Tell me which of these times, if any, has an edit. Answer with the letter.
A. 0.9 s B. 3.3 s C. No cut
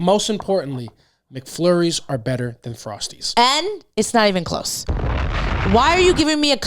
B